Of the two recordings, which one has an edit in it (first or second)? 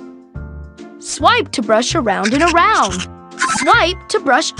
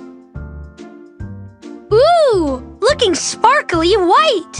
first